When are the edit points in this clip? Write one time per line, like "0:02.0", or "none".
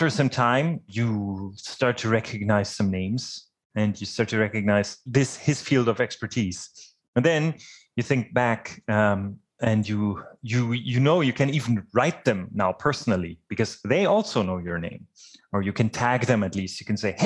0:00.9
0:05.1